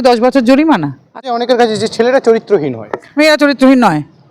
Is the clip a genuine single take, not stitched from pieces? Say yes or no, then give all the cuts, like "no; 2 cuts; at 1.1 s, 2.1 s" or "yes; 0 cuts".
no; 1 cut; at 1.3 s